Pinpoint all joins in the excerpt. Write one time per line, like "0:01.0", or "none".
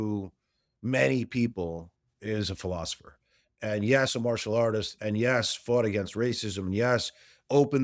none